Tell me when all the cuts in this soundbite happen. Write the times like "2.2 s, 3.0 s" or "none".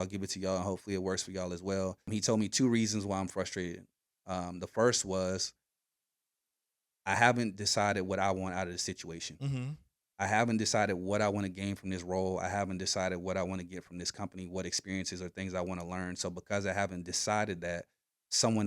2.1 s